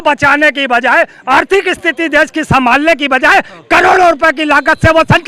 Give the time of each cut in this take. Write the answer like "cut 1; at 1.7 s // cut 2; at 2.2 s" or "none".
none